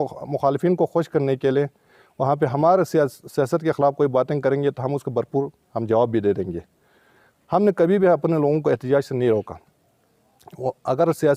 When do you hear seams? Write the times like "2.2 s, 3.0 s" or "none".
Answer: none